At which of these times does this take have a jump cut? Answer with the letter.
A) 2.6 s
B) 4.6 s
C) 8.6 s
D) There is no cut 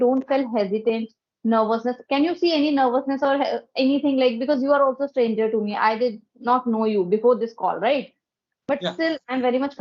D